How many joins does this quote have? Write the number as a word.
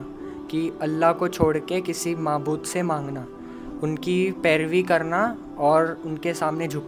zero